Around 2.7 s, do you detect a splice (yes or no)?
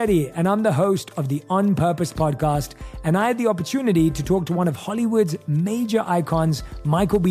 no